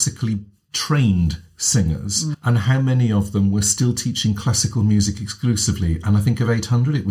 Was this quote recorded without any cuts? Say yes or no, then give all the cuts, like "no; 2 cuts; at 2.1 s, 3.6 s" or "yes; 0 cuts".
no; 1 cut; at 2.3 s